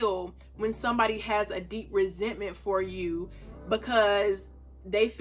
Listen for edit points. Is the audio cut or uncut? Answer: uncut